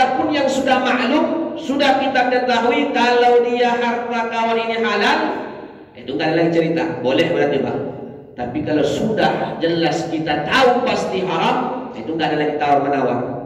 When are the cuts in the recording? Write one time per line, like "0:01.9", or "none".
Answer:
none